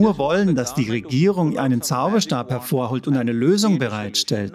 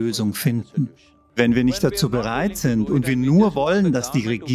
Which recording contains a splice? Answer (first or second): second